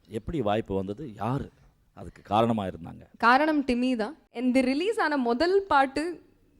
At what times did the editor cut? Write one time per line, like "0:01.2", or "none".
0:04.3